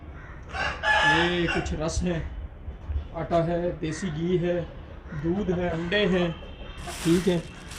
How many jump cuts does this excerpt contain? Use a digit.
1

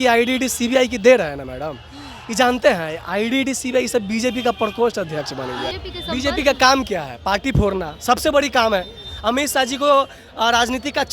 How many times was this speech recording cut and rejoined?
1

